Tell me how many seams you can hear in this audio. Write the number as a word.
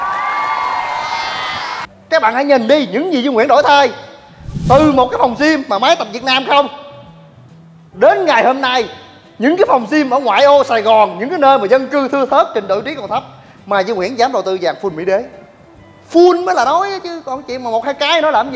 one